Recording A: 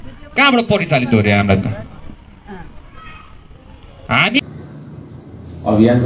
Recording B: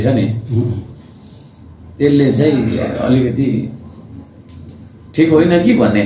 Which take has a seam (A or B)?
A